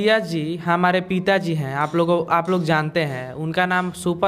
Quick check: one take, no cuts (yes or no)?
yes